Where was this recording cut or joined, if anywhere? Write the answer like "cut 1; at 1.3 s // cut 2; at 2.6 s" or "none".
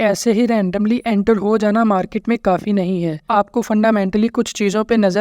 cut 1; at 3.3 s